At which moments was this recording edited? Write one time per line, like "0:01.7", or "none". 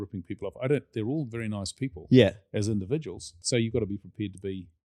0:03.4